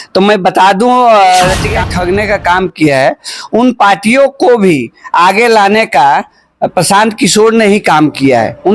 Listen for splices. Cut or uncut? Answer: cut